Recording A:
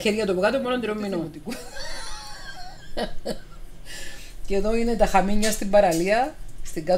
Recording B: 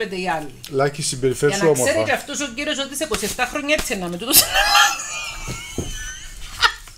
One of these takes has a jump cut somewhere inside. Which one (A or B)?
A